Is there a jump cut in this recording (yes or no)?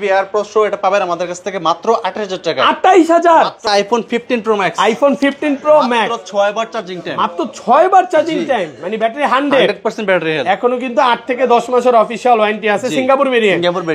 yes